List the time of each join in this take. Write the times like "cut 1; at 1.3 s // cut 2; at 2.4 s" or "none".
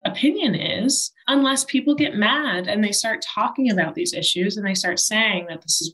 cut 1; at 1.1 s